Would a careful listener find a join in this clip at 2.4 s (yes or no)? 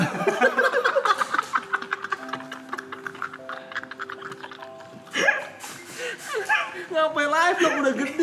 no